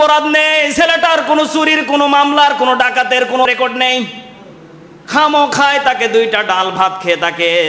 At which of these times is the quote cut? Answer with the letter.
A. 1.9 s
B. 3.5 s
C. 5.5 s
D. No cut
B